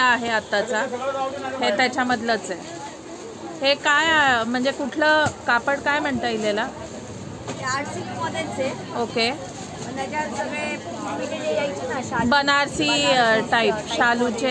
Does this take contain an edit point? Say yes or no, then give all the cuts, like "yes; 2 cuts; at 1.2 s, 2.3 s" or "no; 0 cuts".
no; 0 cuts